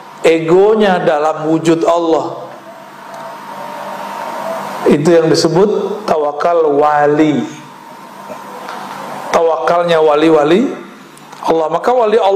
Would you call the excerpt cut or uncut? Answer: uncut